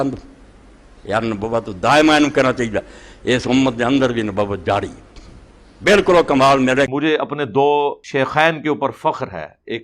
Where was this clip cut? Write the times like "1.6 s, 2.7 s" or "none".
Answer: 6.9 s, 8.0 s